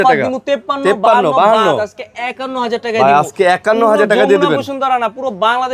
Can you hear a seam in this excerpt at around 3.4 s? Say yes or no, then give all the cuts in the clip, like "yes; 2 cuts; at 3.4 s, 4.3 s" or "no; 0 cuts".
no; 0 cuts